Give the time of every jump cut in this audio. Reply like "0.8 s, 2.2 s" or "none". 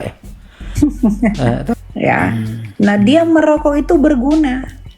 1.8 s